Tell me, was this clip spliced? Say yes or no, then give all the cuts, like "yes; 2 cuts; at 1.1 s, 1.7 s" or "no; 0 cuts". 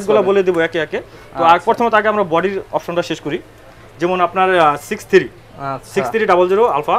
no; 0 cuts